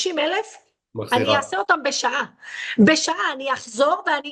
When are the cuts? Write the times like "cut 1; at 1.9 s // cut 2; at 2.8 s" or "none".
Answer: none